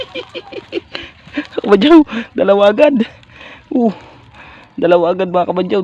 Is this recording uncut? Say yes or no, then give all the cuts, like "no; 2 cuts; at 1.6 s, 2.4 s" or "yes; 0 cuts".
yes; 0 cuts